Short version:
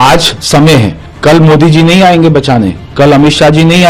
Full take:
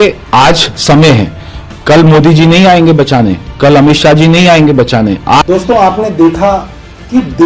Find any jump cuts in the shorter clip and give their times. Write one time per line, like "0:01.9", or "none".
0:01.0